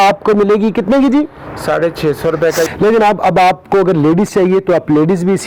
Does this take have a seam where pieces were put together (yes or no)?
yes